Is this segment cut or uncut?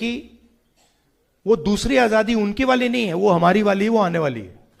uncut